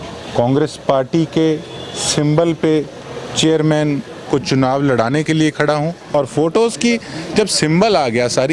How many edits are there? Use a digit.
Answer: 1